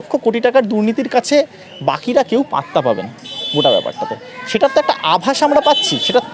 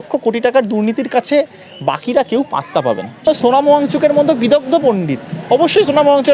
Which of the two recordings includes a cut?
second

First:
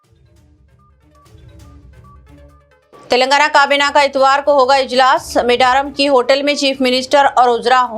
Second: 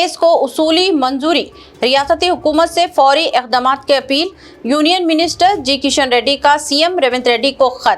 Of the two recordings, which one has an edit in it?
first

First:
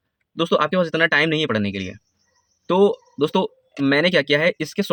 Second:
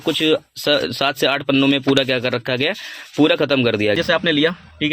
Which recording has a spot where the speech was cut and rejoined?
second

